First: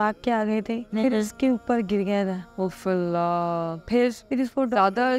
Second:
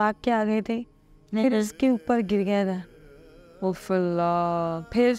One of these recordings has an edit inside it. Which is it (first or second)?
first